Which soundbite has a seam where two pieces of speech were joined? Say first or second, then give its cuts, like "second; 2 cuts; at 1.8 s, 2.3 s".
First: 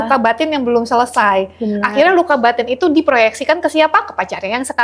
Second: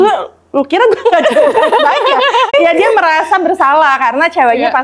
second; 1 cut; at 2.5 s